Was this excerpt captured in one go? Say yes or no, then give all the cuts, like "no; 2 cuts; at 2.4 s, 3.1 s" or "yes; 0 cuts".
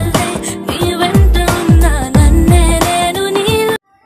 yes; 0 cuts